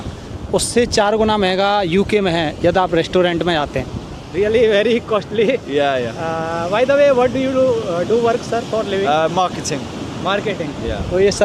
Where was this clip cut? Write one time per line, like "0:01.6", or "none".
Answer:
none